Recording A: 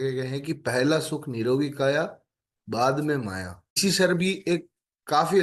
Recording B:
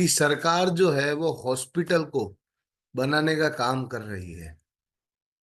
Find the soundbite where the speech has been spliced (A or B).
A